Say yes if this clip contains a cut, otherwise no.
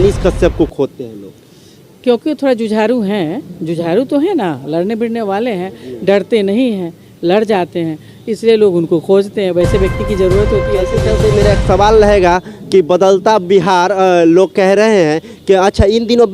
yes